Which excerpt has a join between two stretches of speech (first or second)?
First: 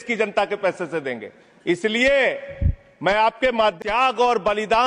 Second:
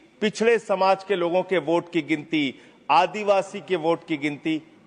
first